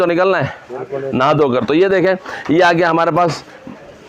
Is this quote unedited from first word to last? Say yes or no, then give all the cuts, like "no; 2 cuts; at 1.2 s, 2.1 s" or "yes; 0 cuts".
yes; 0 cuts